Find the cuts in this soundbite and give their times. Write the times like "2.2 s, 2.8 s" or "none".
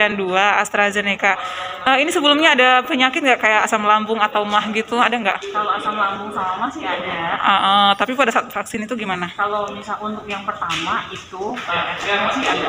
none